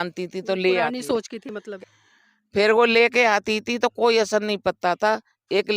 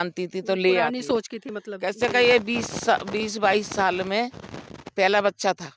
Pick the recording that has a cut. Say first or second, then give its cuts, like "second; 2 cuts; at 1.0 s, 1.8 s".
first; 1 cut; at 1.7 s